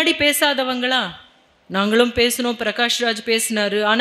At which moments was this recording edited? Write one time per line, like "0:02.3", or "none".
none